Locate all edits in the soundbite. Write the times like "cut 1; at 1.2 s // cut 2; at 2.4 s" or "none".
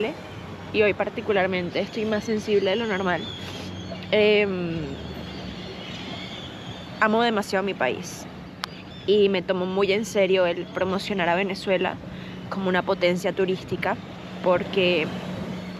none